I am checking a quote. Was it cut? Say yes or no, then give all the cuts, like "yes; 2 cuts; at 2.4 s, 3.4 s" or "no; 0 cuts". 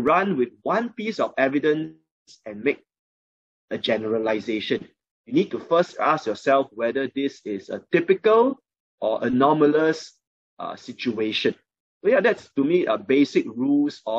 no; 0 cuts